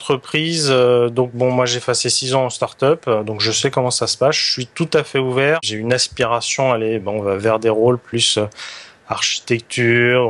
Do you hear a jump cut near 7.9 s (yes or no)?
no